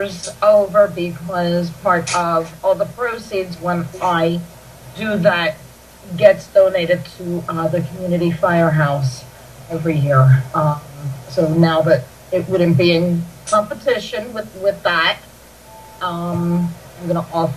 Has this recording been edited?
yes; 1 cut; at 5.2 s

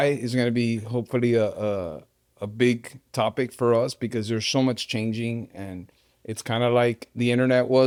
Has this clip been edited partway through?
no; 0 cuts

